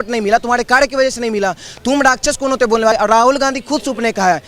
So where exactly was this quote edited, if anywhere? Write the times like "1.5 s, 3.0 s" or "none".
2.9 s